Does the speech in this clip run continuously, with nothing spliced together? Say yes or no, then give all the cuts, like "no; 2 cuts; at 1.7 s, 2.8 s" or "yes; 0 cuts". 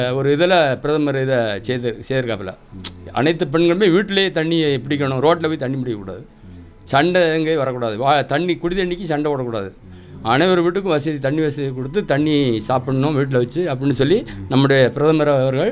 yes; 0 cuts